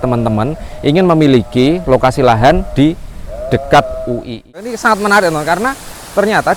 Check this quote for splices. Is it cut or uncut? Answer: cut